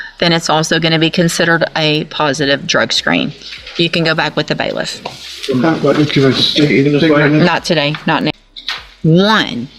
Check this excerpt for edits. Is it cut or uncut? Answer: cut